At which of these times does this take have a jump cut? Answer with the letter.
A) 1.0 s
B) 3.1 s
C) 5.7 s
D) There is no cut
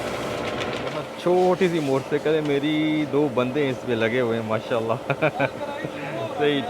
A